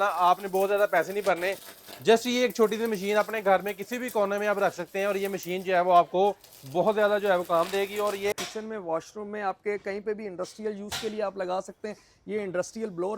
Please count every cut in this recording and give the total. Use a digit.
1